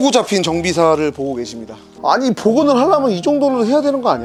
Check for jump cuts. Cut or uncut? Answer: uncut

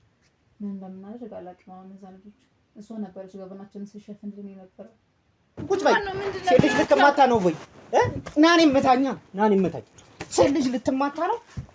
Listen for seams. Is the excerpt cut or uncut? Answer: cut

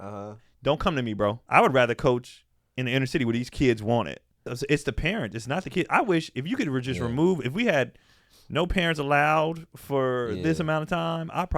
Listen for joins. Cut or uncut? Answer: cut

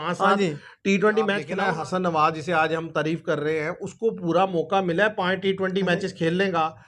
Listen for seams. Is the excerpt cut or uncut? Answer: cut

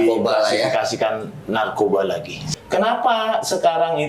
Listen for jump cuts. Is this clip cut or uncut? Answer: cut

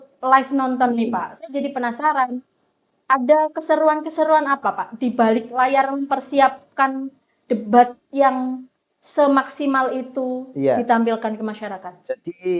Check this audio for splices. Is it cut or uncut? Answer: uncut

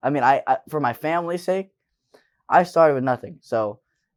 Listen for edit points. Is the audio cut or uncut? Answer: uncut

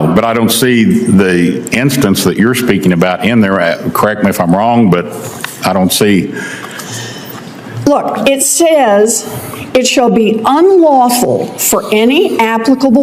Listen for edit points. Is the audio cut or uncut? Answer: uncut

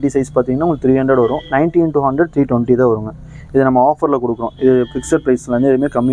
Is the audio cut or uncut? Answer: uncut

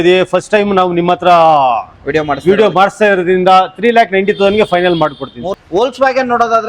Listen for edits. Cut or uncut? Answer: cut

